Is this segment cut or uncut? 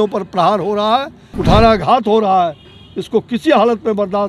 cut